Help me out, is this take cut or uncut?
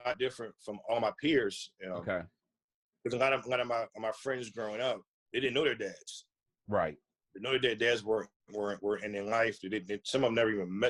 uncut